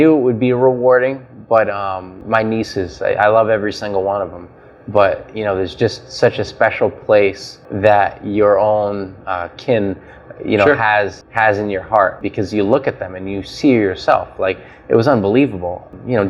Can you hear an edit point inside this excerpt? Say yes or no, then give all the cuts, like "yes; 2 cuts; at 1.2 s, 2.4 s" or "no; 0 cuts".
no; 0 cuts